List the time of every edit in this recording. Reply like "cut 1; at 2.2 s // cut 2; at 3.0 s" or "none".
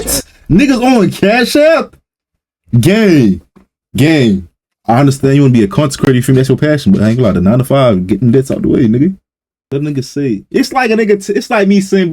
cut 1; at 9.7 s